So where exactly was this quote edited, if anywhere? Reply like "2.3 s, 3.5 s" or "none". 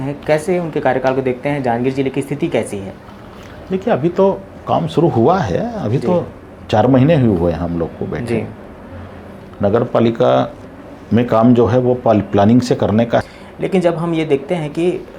13.4 s